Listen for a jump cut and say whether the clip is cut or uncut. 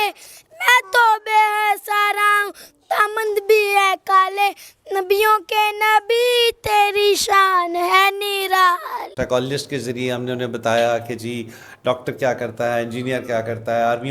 cut